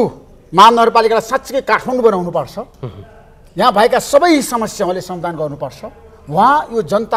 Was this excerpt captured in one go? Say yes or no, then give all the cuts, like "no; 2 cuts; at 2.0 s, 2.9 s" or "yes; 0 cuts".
yes; 0 cuts